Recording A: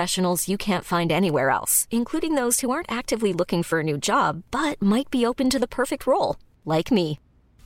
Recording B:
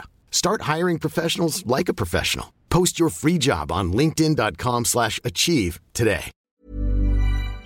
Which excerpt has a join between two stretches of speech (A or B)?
B